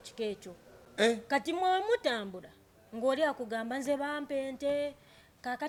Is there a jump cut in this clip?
no; 0 cuts

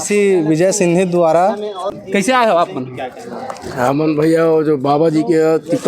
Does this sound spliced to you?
yes; 1 cut; at 1.9 s

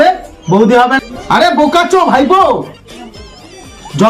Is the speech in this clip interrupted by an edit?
yes; 1 cut; at 1.0 s

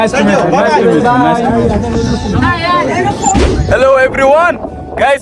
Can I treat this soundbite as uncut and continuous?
no; 1 cut; at 3.4 s

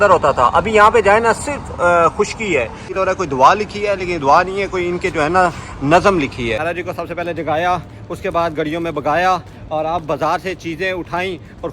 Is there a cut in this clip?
yes; 2 cuts; at 2.9 s, 6.6 s

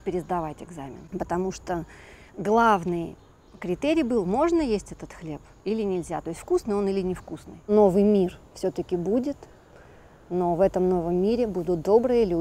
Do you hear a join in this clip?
yes; 2 cuts; at 1.0 s, 7.7 s

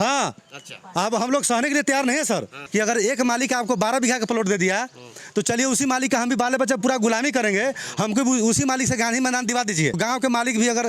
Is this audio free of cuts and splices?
no; 2 cuts; at 2.6 s, 10.0 s

